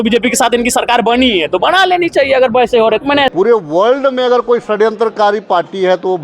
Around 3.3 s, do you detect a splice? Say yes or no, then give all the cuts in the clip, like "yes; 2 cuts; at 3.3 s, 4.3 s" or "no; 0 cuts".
yes; 1 cut; at 3.3 s